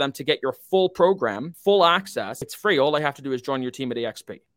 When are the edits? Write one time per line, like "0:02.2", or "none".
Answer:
0:01.5
0:02.4